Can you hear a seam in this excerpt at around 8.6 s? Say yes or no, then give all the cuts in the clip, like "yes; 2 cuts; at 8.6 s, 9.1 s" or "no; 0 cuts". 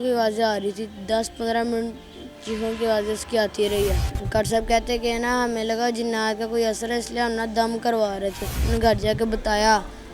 yes; 2 cuts; at 4.1 s, 8.6 s